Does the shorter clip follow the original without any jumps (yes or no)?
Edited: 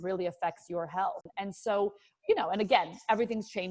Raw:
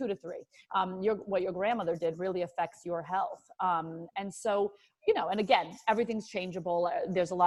no